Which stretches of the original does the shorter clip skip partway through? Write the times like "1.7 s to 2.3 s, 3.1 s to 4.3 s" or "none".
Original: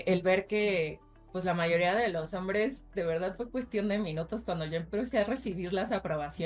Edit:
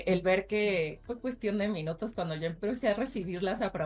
1.1 s to 3.4 s